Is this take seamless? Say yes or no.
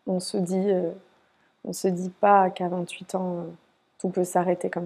yes